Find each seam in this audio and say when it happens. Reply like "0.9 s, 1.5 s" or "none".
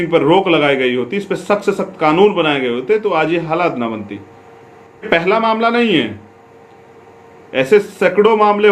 5.1 s